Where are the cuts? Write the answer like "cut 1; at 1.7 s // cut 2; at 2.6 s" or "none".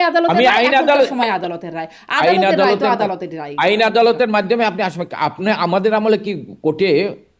none